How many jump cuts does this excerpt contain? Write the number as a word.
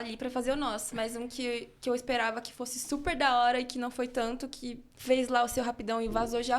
one